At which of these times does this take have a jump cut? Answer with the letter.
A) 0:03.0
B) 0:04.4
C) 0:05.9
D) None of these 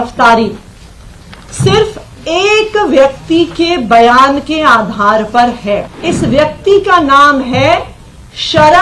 C